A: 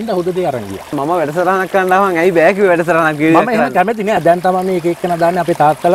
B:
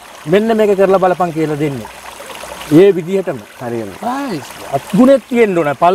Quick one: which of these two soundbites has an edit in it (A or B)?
A